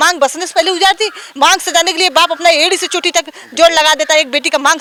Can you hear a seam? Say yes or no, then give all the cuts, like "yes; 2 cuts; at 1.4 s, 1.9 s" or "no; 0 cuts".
no; 0 cuts